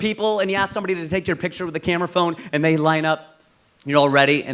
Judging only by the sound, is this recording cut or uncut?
uncut